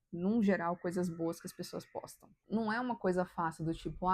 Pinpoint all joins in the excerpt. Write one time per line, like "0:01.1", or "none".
0:02.2